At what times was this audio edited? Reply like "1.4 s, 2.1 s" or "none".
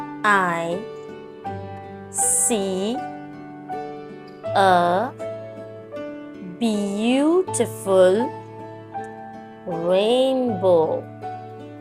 1.3 s, 2.5 s, 8.4 s, 9.6 s, 11.1 s